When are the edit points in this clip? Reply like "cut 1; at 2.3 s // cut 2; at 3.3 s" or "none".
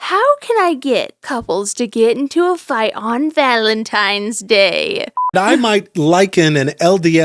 cut 1; at 1.3 s // cut 2; at 5.2 s